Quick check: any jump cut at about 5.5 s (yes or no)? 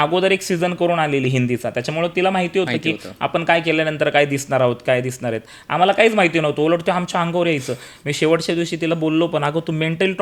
no